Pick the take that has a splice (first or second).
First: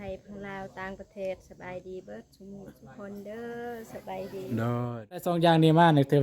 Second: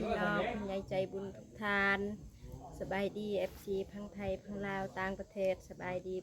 first